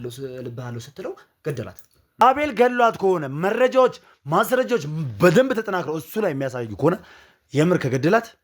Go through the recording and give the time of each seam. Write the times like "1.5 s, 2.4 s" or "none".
2.2 s